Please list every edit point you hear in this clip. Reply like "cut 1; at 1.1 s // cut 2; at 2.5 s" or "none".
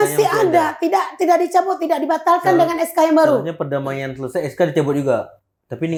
none